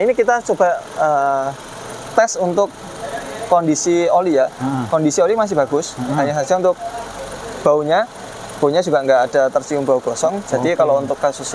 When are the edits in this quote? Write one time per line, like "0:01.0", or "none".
none